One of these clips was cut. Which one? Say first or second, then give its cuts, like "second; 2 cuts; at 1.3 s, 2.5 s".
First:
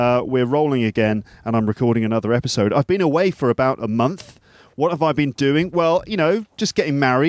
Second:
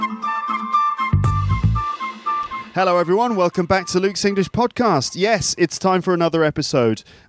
second; 1 cut; at 2.5 s